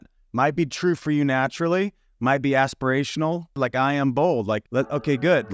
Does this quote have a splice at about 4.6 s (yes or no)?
yes